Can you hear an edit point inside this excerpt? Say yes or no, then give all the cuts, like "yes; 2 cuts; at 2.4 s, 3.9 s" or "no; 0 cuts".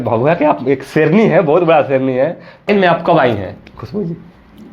yes; 1 cut; at 2.7 s